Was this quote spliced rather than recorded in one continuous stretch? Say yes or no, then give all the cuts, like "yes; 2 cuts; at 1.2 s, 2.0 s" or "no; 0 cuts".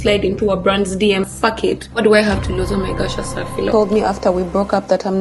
yes; 2 cuts; at 1.3 s, 3.7 s